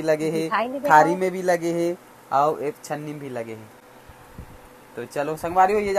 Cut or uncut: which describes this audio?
uncut